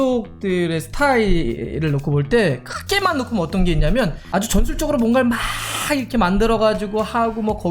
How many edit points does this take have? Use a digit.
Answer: 1